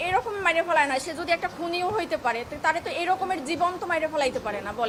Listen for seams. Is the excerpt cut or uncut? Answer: uncut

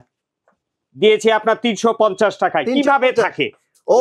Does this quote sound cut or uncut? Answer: uncut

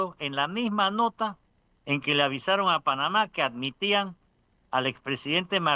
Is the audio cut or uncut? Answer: uncut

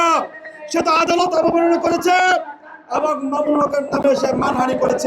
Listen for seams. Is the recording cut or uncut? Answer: uncut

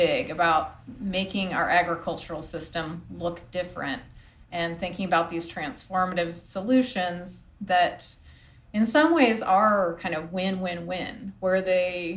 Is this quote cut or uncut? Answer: uncut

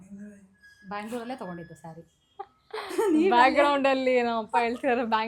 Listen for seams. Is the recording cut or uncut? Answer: uncut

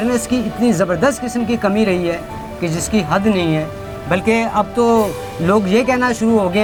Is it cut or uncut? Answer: uncut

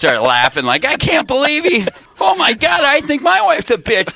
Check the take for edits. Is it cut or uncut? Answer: cut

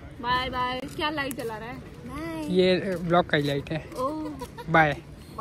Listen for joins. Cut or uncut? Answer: uncut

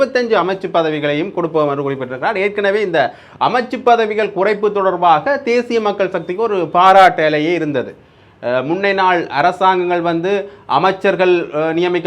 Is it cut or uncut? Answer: uncut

